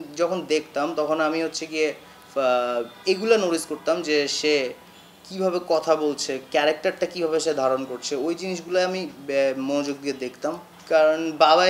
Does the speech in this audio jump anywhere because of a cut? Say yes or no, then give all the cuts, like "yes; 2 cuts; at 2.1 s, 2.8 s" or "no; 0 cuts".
yes; 1 cut; at 10.7 s